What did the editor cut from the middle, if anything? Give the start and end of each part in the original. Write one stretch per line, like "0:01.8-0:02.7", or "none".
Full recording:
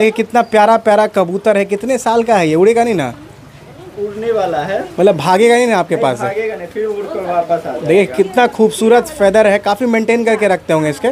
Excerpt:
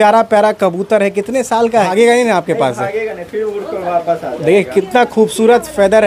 0:02.4-0:05.3

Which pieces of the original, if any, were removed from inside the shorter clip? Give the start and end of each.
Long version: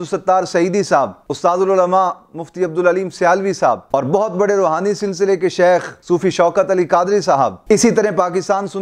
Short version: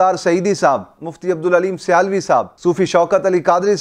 0:01.2-0:02.3
0:03.8-0:05.9

